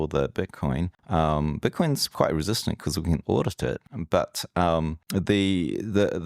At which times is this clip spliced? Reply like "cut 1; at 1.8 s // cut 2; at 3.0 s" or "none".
cut 1; at 1.0 s // cut 2; at 3.9 s // cut 3; at 5.0 s